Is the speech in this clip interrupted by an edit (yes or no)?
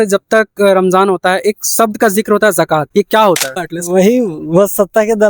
yes